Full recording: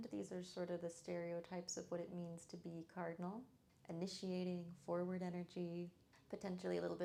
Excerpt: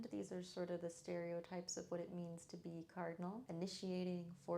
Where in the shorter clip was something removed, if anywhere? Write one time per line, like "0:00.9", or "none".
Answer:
0:03.4